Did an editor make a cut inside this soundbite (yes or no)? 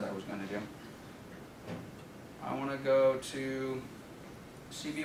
no